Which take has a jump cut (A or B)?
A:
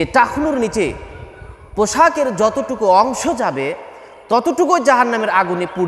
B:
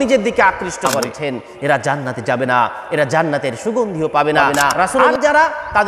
B